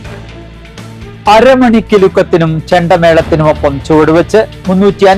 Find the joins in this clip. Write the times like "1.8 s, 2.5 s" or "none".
0.9 s